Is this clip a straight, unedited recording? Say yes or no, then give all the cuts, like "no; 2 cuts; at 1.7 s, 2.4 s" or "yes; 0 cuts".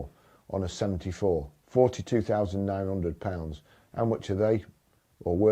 no; 1 cut; at 1.6 s